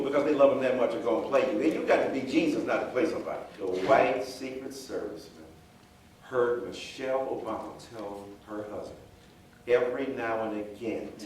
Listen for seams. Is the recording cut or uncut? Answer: cut